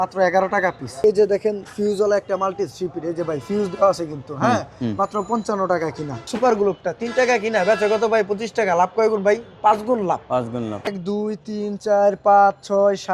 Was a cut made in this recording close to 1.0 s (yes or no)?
yes